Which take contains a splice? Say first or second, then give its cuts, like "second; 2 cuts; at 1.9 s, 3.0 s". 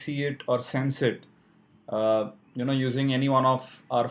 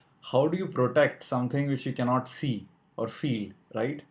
second; 1 cut; at 2.3 s